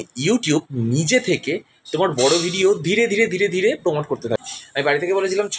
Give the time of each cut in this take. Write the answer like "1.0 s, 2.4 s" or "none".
4.4 s